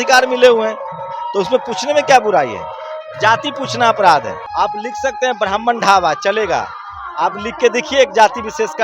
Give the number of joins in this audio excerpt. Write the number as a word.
one